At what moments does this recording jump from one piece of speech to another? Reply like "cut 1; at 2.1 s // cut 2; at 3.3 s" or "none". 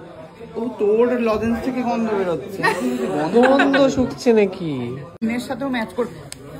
cut 1; at 5.1 s